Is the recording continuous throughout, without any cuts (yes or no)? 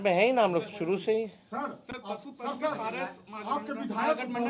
yes